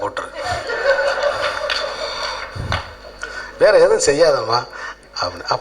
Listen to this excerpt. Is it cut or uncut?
uncut